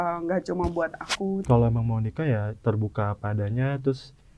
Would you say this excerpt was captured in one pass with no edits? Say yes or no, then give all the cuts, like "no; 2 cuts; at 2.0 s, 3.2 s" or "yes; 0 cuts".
no; 1 cut; at 1.4 s